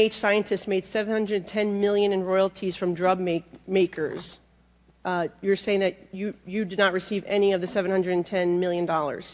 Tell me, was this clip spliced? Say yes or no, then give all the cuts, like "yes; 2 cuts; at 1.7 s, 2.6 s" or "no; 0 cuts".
no; 0 cuts